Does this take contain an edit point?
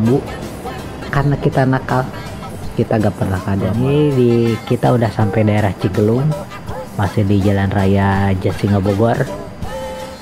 yes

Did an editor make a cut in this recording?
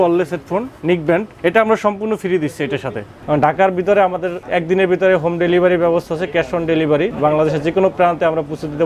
yes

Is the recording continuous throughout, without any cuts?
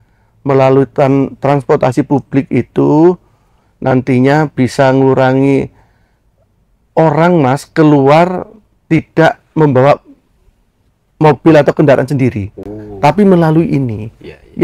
yes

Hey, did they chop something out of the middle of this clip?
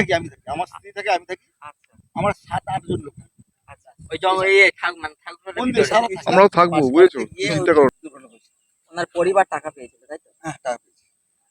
yes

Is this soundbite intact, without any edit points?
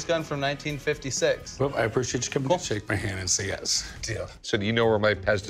no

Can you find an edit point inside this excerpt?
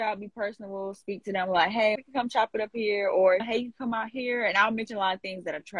no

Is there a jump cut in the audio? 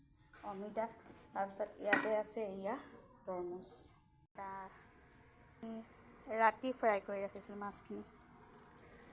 yes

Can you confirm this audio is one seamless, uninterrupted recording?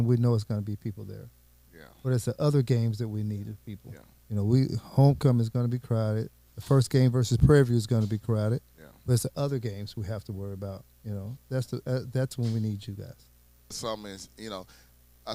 no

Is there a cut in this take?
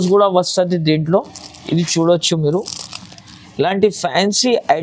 no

